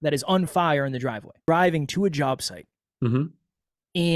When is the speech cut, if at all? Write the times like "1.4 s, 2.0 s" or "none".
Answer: 1.4 s

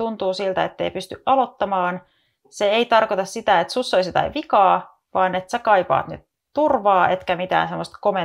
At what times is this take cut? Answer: none

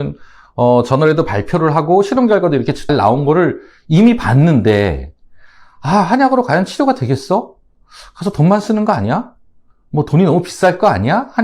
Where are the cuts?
none

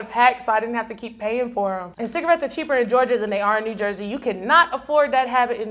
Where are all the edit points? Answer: 1.9 s

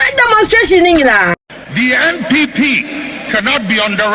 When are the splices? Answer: 1.4 s

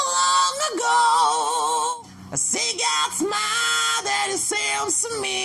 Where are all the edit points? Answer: 1.9 s

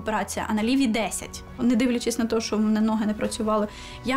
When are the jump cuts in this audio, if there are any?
1.6 s

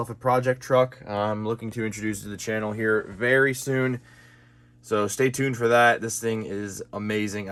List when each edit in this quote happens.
none

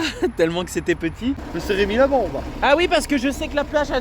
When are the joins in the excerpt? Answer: 1.5 s

